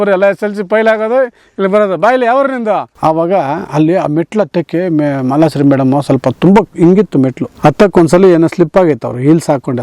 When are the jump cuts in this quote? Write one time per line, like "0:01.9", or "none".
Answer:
0:02.9
0:07.5